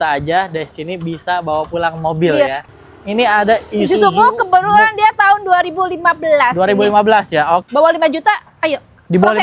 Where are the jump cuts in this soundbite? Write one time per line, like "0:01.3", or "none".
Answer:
0:02.6
0:07.6